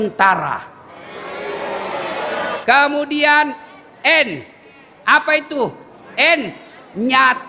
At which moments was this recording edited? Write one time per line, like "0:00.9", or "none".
0:02.5